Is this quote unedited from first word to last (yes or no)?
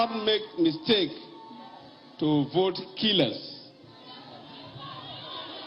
yes